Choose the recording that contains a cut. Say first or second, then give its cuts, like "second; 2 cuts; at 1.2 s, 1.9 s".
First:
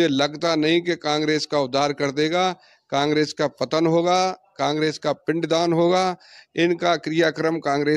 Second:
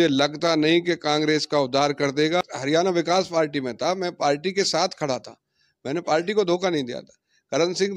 second; 1 cut; at 2.4 s